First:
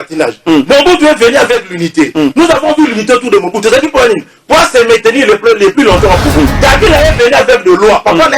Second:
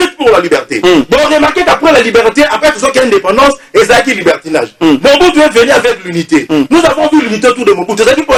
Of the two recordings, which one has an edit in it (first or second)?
first